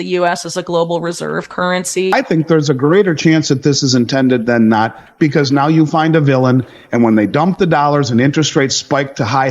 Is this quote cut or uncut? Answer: cut